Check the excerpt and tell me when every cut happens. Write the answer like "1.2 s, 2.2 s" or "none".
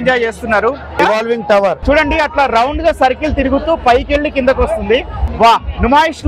0.9 s, 1.8 s, 5.2 s